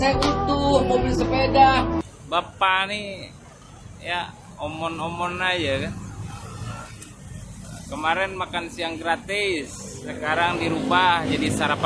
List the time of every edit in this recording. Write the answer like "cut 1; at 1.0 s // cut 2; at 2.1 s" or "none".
cut 1; at 2.0 s